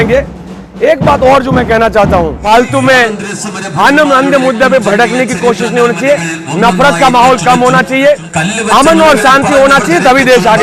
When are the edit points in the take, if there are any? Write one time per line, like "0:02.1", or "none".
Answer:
0:02.4